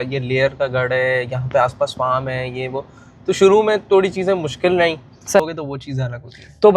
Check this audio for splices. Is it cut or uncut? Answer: cut